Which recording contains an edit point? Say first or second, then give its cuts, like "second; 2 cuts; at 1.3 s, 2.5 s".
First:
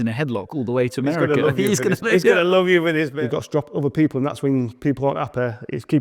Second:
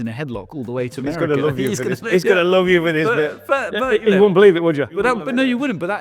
first; 1 cut; at 3.0 s